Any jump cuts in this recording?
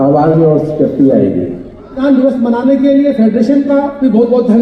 yes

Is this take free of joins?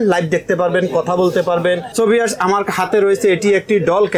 no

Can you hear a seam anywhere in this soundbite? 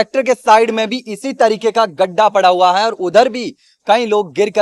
no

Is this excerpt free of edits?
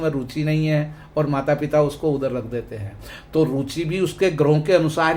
yes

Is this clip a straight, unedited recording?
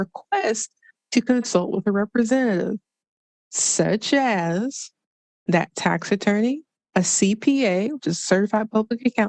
no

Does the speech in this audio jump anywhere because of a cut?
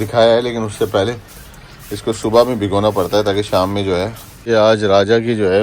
yes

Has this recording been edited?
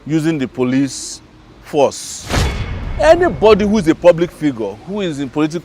yes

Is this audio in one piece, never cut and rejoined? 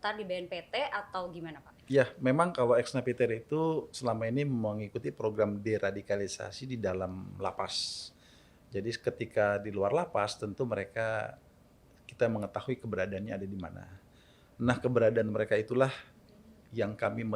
yes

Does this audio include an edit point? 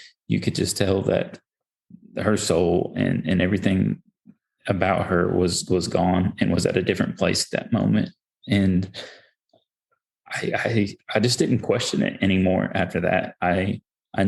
no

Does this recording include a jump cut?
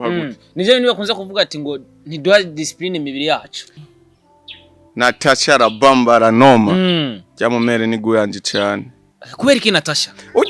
yes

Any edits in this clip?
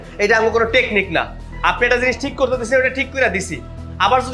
no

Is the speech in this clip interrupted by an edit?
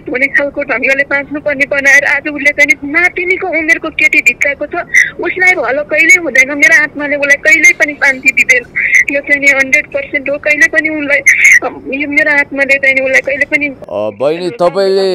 no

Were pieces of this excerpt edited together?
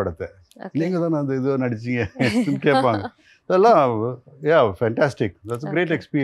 no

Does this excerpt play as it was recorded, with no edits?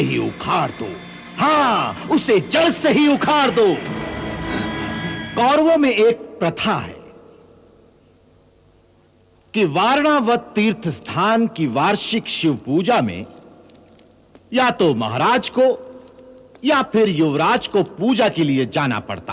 no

